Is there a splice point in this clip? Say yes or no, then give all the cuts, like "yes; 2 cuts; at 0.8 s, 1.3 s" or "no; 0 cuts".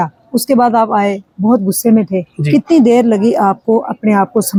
no; 0 cuts